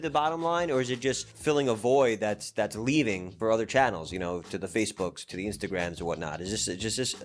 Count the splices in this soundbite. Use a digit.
2